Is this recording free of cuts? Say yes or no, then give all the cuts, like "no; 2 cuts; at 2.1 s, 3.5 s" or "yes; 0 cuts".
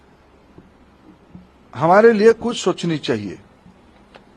yes; 0 cuts